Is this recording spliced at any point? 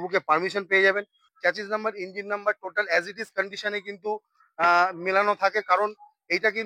yes; 1 cut; at 1.2 s

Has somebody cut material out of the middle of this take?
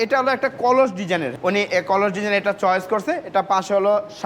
yes; 1 cut; at 1.3 s

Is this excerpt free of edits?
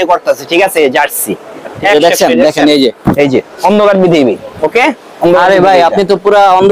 no; 1 cut; at 1.7 s

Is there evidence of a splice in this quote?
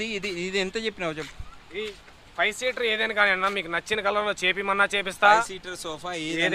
no; 0 cuts

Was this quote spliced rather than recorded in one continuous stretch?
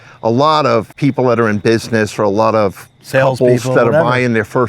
yes; 1 cut; at 0.9 s

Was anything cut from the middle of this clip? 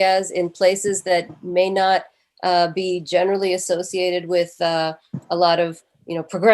yes; 1 cut; at 1.4 s

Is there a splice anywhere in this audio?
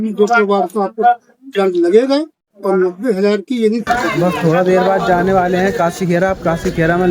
yes; 1 cut; at 4.1 s

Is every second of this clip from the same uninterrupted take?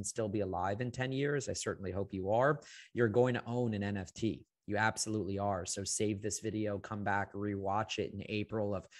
yes; 0 cuts

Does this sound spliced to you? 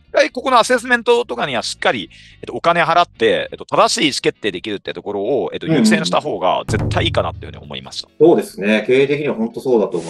no; 0 cuts

